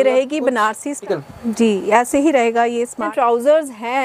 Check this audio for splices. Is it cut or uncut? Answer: cut